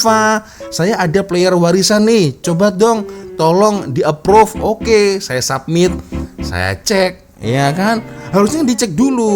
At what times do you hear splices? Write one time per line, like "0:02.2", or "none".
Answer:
none